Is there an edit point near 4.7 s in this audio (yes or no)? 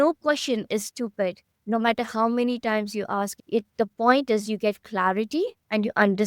no